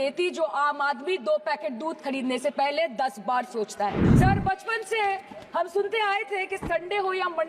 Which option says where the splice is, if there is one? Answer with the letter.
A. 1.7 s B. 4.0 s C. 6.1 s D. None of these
B